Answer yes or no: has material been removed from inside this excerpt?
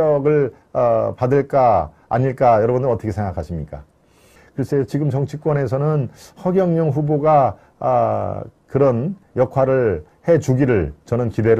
no